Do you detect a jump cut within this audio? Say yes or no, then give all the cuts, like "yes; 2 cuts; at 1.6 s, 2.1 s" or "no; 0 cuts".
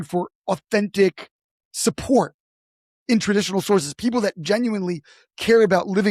no; 0 cuts